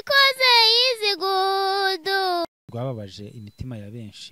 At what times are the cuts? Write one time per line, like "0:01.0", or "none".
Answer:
0:02.5